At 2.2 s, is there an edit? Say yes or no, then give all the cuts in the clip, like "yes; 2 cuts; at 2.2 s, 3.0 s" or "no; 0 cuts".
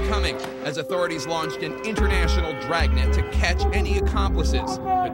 yes; 1 cut; at 2.2 s